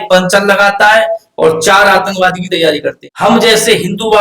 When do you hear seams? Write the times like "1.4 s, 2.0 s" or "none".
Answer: 3.0 s